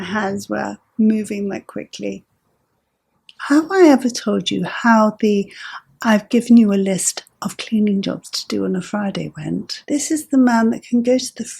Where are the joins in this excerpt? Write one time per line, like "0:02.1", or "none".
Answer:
0:03.3
0:09.7